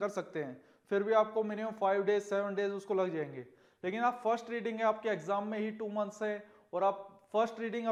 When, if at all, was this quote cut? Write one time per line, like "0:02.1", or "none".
none